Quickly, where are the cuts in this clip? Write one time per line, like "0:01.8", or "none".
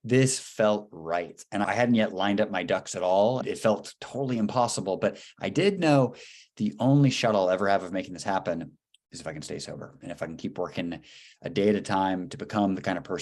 0:01.6
0:03.4